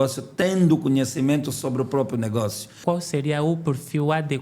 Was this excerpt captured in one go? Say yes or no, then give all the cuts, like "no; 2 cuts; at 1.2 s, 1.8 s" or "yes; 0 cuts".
no; 1 cut; at 2.8 s